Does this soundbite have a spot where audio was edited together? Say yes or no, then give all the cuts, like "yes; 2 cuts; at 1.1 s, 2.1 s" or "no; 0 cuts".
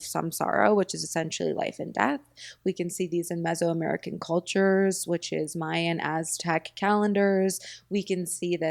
no; 0 cuts